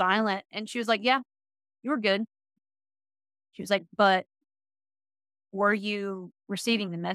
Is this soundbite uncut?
yes; 0 cuts

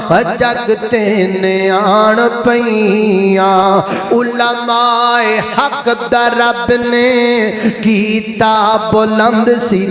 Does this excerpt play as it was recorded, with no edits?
yes; 0 cuts

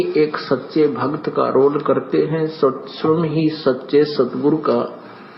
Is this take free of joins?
no; 1 cut; at 1.2 s

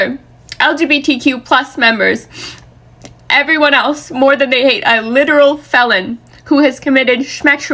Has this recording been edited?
no; 0 cuts

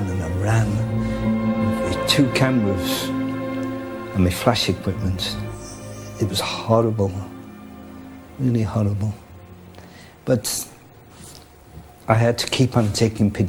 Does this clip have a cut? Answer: no; 0 cuts

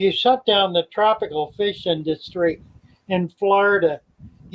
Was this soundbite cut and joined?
no; 0 cuts

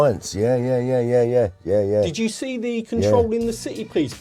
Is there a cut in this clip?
no; 0 cuts

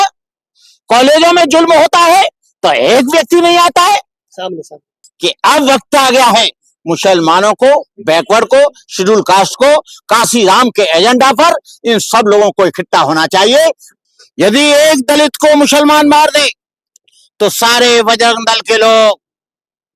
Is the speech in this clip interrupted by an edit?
yes; 2 cuts; at 5.0 s, 13.9 s

